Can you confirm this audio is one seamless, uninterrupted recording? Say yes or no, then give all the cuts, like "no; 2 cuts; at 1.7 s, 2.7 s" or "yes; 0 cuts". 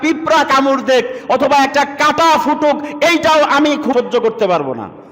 no; 1 cut; at 3.9 s